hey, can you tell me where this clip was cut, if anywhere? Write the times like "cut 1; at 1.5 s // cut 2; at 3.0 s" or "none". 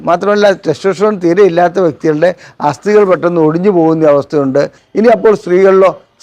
cut 1; at 4.8 s